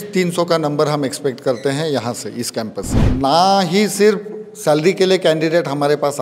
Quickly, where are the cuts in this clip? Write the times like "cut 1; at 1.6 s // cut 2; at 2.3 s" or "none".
cut 1; at 2.9 s